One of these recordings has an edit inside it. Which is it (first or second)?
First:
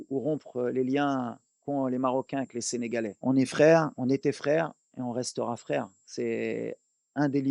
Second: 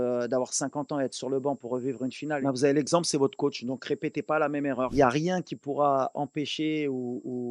second